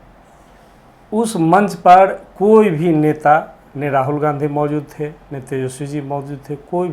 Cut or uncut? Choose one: uncut